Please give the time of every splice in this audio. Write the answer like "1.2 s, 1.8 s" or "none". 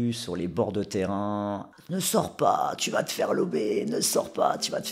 none